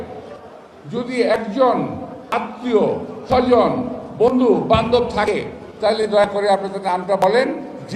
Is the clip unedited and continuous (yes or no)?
yes